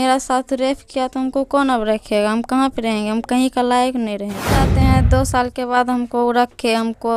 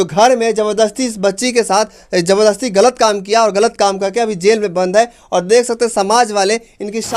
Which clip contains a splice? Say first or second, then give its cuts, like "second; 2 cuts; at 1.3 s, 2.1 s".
first; 1 cut; at 4.7 s